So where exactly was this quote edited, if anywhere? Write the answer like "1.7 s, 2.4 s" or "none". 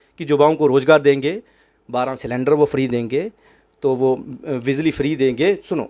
none